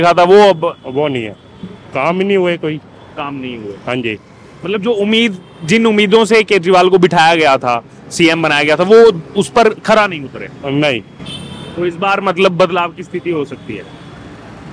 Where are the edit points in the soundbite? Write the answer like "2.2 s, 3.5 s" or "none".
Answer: none